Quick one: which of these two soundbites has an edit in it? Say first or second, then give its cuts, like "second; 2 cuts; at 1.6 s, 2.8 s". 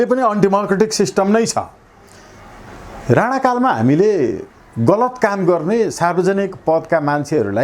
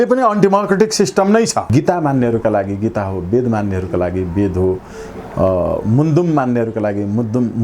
second; 1 cut; at 1.7 s